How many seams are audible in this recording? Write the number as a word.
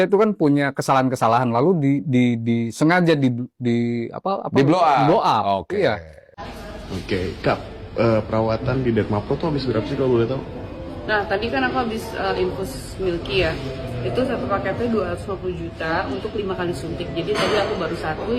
one